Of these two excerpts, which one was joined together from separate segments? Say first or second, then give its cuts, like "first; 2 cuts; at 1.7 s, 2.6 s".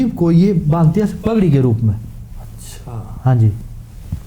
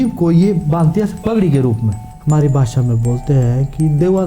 second; 1 cut; at 2.1 s